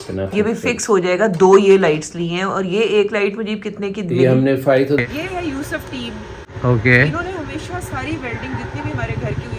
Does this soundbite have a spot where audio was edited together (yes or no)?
yes